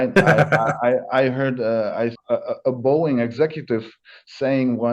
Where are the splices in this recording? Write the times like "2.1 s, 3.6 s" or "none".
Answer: 2.2 s